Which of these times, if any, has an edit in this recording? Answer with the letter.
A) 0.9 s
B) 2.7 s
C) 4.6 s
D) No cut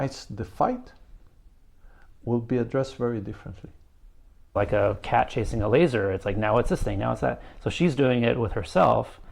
C